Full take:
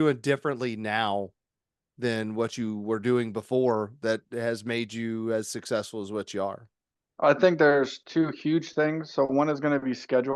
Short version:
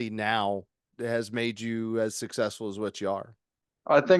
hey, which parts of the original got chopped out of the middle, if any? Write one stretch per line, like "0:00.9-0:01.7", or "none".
0:01.6-0:04.3